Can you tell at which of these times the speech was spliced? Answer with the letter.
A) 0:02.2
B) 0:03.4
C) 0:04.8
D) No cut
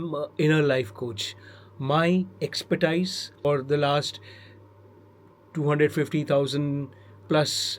B